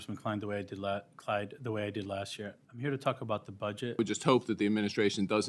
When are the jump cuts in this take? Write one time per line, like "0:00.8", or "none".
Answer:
0:04.0